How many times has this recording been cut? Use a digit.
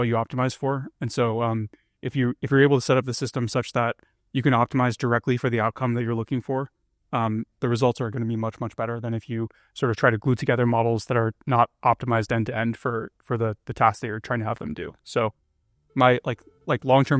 0